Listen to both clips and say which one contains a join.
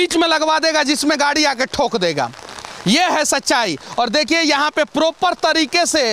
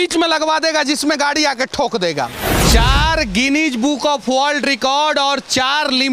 second; 1 cut; at 2.5 s

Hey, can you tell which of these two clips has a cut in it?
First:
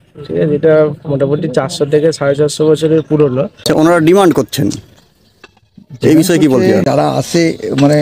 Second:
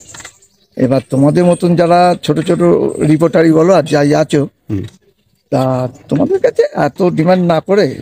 first; 2 cuts; at 3.7 s, 6.8 s

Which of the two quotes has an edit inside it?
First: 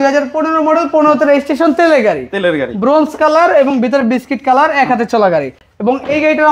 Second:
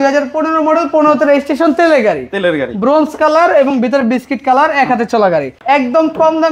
second; 1 cut; at 5.6 s

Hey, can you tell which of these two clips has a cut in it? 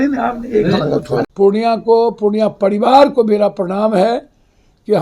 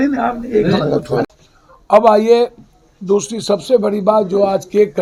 first; 1 cut; at 1.3 s

